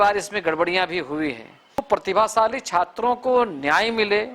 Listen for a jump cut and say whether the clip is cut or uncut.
cut